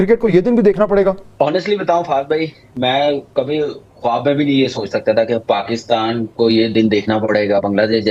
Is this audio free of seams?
no; 1 cut; at 1.2 s

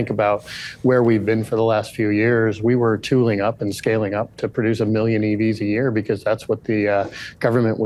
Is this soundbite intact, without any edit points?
yes; 0 cuts

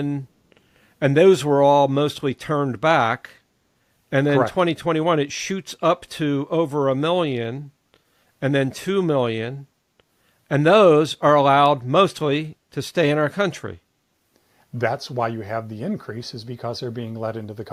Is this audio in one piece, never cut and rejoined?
yes; 0 cuts

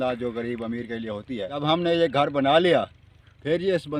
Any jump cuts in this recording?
yes; 1 cut; at 1.5 s

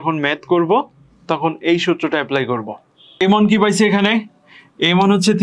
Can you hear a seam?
yes; 1 cut; at 3.2 s

